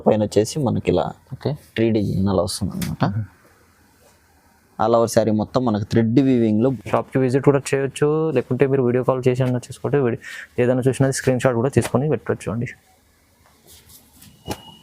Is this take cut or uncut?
cut